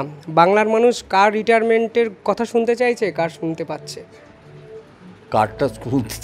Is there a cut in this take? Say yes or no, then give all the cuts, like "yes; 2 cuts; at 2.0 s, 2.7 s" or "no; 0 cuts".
no; 0 cuts